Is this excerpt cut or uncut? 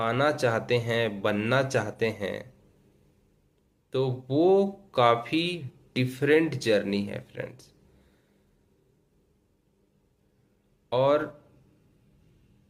uncut